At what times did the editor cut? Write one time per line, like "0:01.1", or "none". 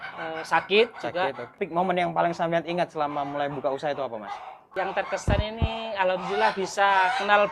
0:01.6
0:04.7